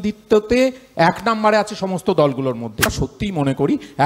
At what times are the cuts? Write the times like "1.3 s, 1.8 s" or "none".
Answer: 2.9 s

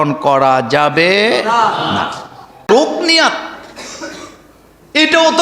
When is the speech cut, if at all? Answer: 2.7 s

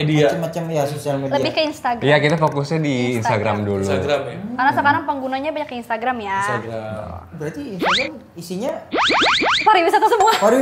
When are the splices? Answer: none

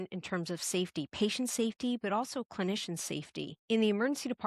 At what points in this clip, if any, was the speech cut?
3.6 s

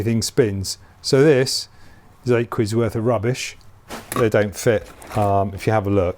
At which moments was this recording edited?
4.1 s

